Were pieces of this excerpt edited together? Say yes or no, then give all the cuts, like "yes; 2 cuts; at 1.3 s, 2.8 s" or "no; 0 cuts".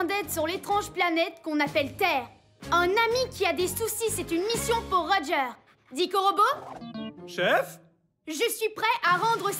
no; 0 cuts